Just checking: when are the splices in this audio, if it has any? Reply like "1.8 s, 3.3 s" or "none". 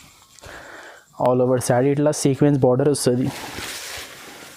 none